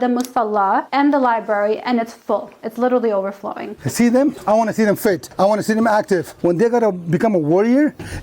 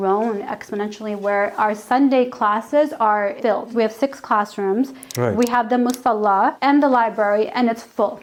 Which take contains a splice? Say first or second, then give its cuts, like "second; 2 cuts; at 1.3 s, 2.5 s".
first; 4 cuts; at 3.7 s, 4.4 s, 5.3 s, 6.3 s